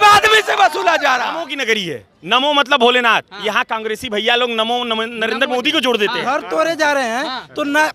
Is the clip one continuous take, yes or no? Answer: no